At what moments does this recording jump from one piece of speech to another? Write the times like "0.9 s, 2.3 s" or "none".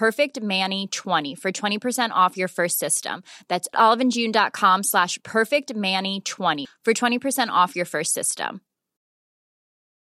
none